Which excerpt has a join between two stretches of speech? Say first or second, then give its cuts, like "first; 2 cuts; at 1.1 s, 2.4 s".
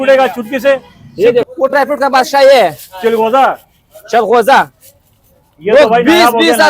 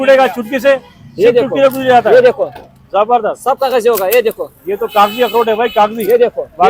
first; 1 cut; at 1.5 s